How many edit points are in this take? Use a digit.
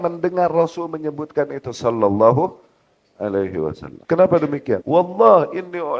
2